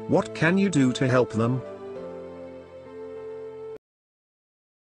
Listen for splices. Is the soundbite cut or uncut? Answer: uncut